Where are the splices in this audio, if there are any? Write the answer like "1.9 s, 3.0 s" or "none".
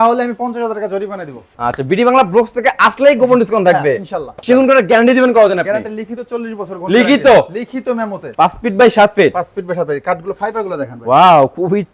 1.5 s, 4.4 s, 8.2 s

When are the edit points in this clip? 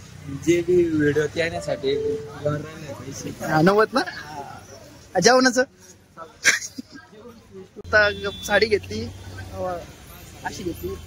7.8 s

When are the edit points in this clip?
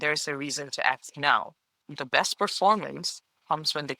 1.9 s

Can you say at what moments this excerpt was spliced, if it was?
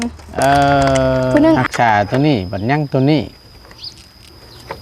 1.6 s

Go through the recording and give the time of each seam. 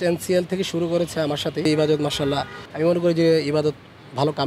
1.6 s, 2.6 s

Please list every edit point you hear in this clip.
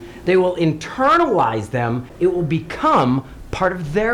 2.1 s

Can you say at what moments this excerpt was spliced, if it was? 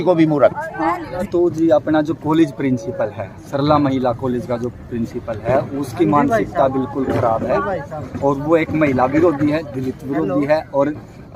1.3 s

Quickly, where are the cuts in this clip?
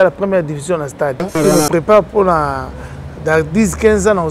1.4 s

